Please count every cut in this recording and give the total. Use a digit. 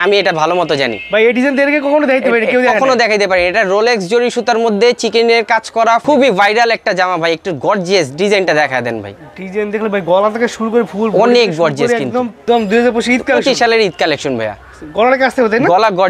2